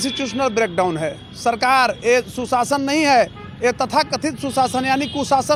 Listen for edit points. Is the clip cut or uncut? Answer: uncut